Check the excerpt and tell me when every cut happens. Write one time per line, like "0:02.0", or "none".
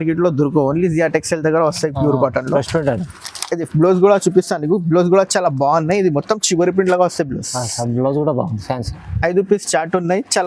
none